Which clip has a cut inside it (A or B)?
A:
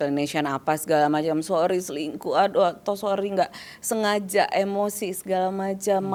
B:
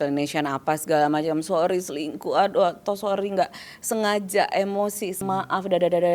B